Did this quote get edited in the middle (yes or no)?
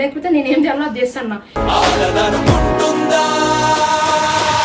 no